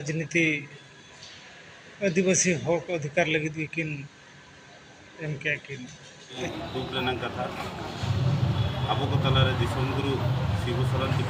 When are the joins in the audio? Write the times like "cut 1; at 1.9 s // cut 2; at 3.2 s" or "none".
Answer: cut 1; at 6.4 s